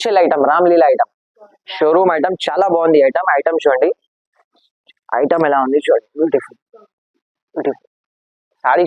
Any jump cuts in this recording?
no; 0 cuts

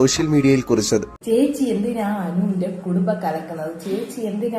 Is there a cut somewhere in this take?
yes; 1 cut; at 1.1 s

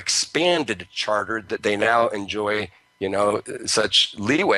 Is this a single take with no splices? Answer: no; 1 cut; at 2.1 s

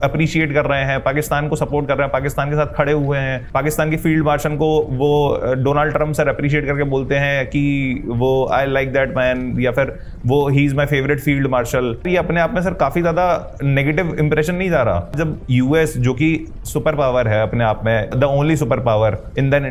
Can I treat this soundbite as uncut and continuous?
yes; 0 cuts

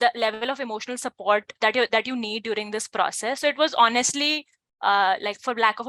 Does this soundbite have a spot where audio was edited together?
no; 0 cuts

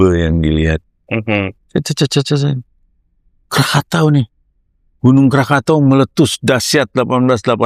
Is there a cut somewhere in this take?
no; 0 cuts

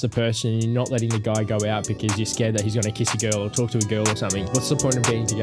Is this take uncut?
no; 1 cut; at 4.5 s

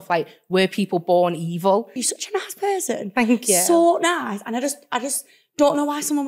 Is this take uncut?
no; 1 cut; at 2.0 s

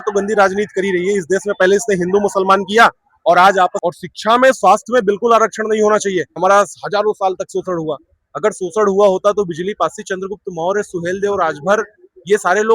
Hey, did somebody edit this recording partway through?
yes; 2 cuts; at 3.8 s, 6.4 s

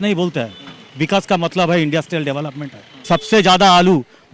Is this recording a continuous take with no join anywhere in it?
no; 1 cut; at 3.1 s

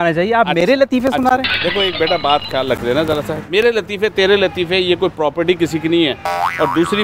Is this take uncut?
yes; 0 cuts

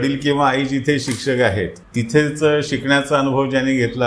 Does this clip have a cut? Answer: yes; 1 cut; at 1.8 s

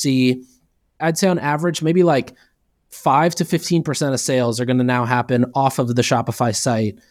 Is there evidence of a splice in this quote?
no; 0 cuts

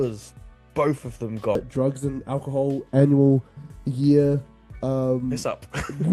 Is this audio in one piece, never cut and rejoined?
no; 1 cut; at 1.6 s

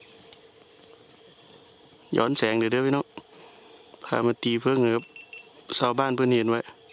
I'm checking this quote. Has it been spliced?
no; 0 cuts

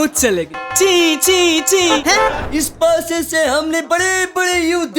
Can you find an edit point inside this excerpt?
yes; 1 cut; at 2.4 s

